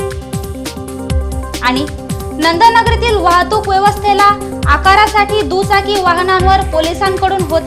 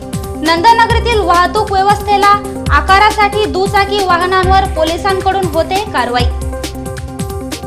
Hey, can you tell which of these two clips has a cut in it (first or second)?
first